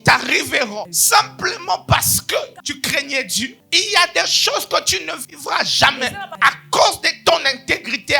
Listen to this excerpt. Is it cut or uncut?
cut